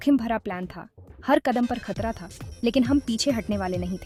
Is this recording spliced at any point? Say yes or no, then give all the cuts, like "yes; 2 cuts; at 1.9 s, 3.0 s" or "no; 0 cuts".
no; 0 cuts